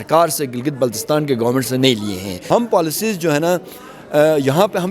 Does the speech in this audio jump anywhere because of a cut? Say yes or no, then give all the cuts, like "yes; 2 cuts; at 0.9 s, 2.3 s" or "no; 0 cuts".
yes; 1 cut; at 2.4 s